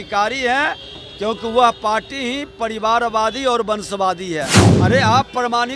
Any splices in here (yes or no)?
yes